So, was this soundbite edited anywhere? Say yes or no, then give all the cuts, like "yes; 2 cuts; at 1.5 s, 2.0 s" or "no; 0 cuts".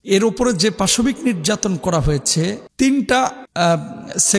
no; 0 cuts